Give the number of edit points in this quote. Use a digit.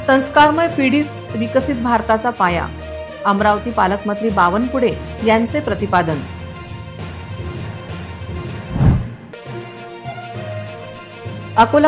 0